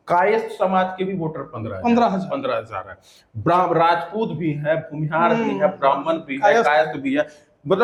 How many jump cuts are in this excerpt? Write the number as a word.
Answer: zero